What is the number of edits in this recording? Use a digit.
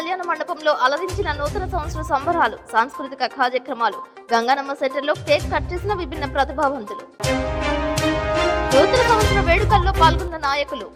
0